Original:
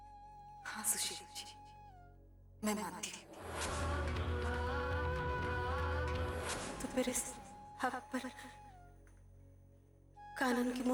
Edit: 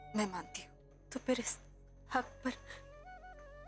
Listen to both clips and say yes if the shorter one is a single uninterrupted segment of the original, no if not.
no